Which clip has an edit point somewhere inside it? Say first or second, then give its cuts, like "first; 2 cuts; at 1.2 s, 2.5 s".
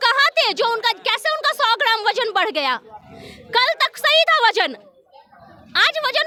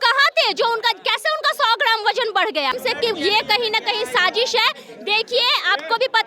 second; 1 cut; at 2.8 s